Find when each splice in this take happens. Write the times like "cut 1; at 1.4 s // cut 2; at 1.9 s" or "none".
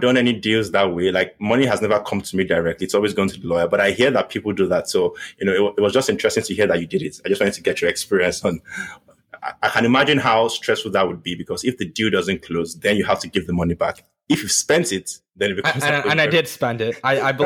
cut 1; at 1.3 s